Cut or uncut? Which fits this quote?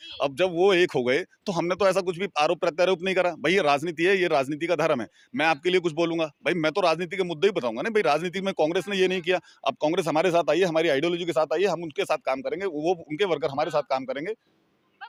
uncut